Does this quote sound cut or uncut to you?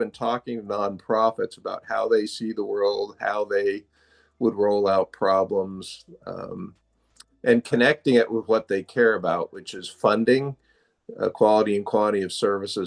uncut